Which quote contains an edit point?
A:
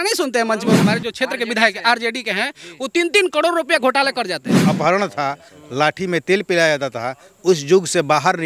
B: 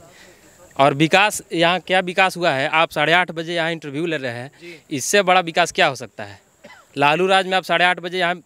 A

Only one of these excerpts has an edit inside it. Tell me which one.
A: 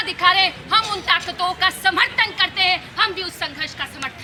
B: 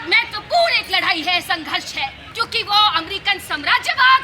B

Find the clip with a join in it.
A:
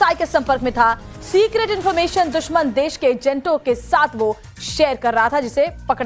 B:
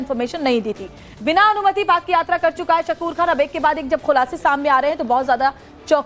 A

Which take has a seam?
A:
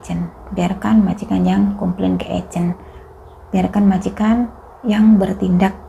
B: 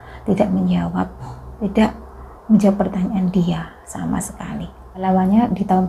B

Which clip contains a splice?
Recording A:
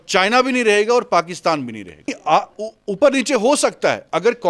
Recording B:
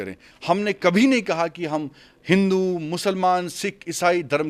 A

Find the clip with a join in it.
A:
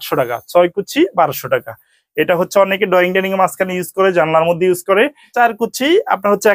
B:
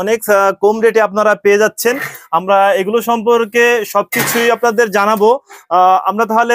A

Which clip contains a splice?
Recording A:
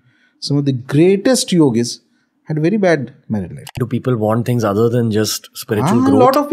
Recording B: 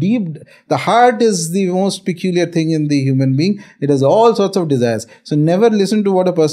A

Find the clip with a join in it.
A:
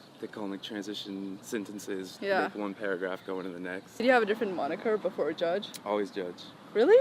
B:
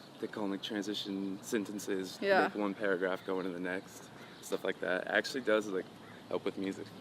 A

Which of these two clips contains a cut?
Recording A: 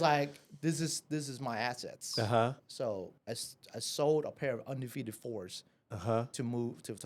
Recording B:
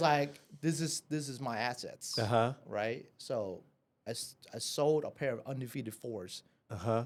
A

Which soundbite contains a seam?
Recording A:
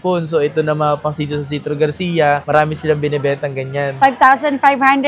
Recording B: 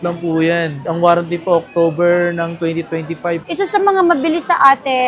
B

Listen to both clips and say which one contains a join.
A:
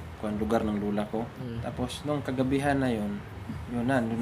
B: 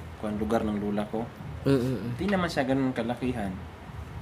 A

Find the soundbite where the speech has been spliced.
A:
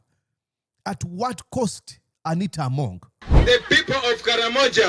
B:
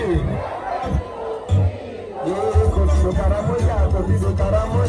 A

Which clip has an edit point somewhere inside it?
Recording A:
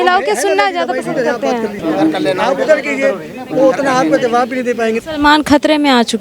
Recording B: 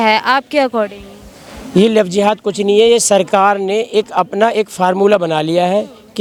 A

